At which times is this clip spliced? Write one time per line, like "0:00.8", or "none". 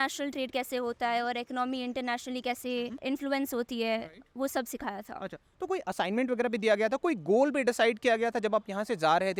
none

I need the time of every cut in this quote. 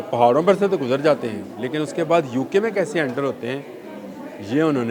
none

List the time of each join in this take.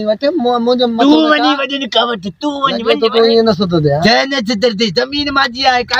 0:02.8

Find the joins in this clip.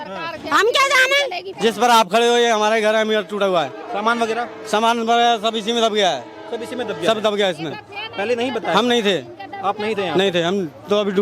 0:01.5

